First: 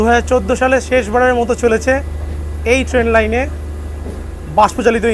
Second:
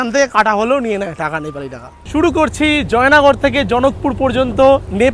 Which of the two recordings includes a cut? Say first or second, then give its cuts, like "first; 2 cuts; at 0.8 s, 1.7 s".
second; 1 cut; at 2.0 s